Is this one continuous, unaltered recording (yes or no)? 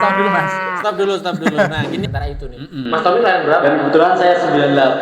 no